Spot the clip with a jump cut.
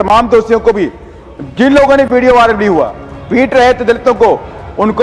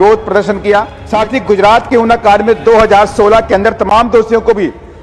second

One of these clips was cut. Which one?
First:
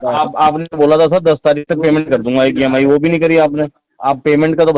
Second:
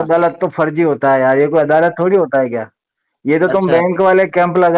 first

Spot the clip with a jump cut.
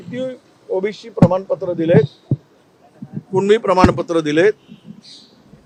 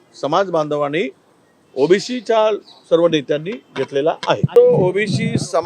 second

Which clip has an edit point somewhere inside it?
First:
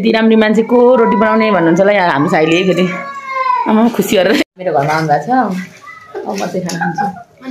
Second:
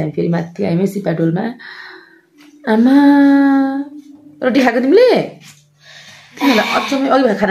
first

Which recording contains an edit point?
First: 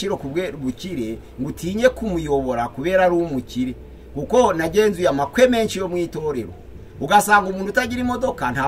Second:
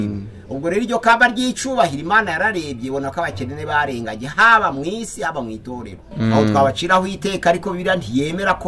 second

